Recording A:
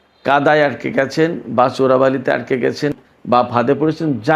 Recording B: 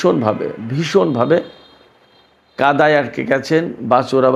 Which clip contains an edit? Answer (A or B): A